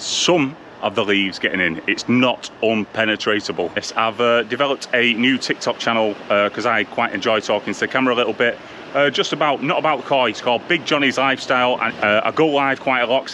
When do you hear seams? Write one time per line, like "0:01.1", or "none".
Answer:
0:03.8
0:11.9